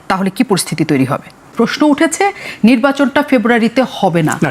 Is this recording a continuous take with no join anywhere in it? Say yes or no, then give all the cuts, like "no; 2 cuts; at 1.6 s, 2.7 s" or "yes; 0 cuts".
no; 1 cut; at 1.5 s